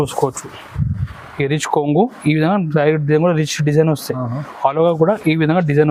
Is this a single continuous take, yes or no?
yes